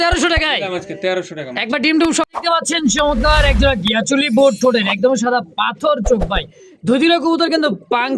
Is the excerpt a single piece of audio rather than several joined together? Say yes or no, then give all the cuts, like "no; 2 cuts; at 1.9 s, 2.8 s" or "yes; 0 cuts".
no; 1 cut; at 2.3 s